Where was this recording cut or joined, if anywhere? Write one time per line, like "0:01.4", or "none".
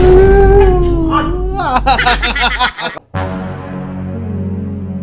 0:03.0